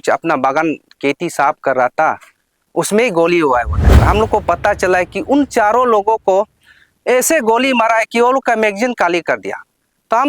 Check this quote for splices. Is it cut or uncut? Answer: cut